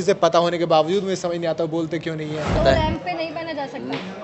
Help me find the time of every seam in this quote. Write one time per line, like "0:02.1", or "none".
0:02.6